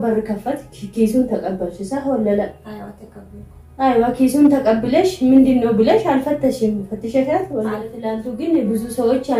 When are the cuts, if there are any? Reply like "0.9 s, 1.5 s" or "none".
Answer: 8.1 s